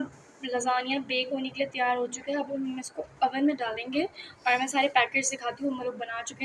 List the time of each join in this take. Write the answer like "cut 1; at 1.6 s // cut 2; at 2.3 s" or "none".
none